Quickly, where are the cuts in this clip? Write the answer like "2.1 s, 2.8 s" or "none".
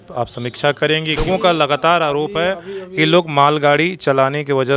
1.2 s